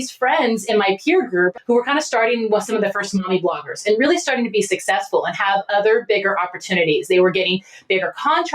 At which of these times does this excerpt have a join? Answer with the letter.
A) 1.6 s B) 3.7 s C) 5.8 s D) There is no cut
A